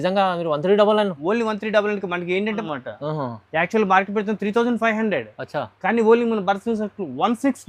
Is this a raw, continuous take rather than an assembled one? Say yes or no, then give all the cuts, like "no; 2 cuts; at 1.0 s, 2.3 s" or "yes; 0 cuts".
no; 1 cut; at 2.6 s